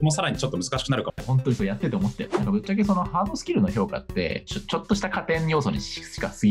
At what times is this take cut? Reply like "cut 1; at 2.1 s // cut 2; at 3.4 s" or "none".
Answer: cut 1; at 1.2 s // cut 2; at 2.2 s